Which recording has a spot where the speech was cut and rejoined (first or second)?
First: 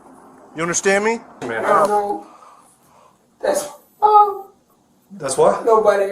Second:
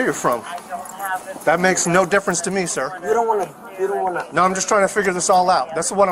first